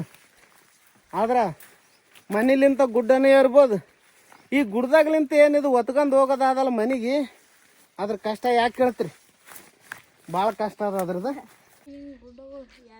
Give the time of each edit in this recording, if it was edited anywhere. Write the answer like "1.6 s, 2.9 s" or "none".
11.8 s